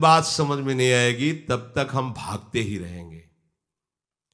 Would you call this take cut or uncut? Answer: uncut